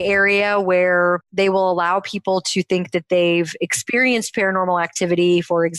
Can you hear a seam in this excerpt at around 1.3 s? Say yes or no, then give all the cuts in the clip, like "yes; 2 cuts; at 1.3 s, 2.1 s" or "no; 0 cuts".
yes; 1 cut; at 1.3 s